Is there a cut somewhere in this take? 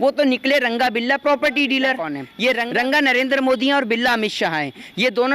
yes; 1 cut; at 2.6 s

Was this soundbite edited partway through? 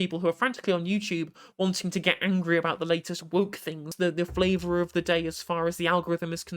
yes; 1 cut; at 3.9 s

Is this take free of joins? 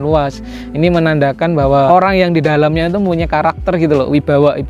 no; 1 cut; at 1.9 s

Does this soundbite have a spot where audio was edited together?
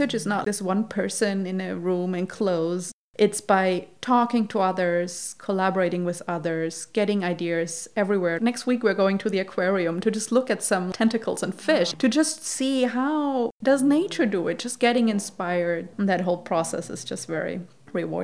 no; 0 cuts

